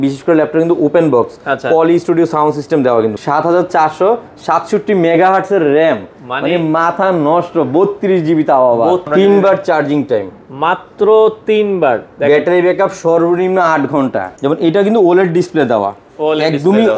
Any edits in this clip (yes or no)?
yes